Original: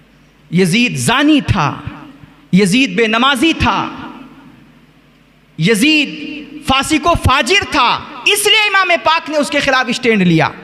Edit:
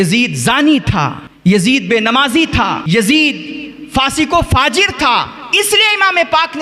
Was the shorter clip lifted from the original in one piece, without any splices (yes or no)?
no